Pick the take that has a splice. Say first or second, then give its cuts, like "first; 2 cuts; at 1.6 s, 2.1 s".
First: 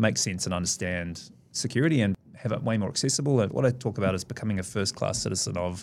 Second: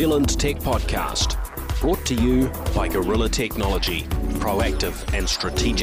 first; 2 cuts; at 2.1 s, 3.5 s